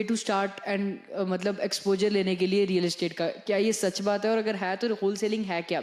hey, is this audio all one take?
yes; 0 cuts

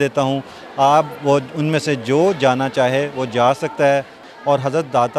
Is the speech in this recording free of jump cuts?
no; 1 cut; at 4.2 s

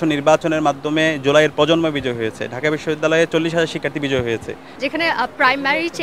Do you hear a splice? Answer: yes; 1 cut; at 4.6 s

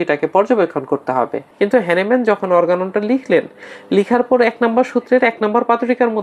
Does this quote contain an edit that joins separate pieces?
yes; 1 cut; at 1.4 s

